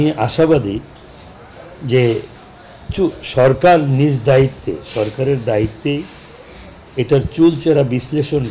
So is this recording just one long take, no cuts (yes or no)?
yes